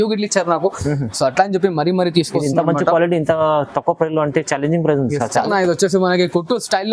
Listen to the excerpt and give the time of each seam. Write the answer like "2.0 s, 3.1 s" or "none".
5.5 s